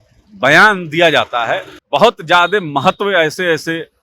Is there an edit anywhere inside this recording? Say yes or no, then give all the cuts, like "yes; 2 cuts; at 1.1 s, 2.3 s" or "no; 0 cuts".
yes; 1 cut; at 1.7 s